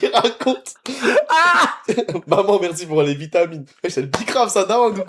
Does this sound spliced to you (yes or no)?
no